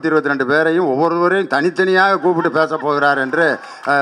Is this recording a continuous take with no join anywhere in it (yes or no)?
yes